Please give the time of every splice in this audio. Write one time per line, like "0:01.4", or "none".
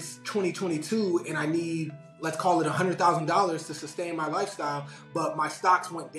none